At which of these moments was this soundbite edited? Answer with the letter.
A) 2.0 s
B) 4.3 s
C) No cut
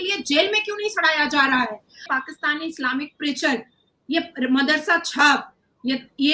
A